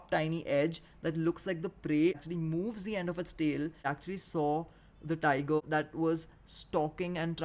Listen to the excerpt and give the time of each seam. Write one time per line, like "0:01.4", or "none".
0:02.2
0:03.9
0:05.6